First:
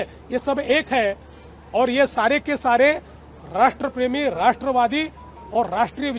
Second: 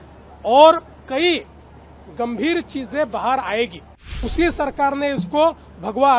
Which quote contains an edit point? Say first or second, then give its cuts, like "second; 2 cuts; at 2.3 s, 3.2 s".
second; 1 cut; at 3.9 s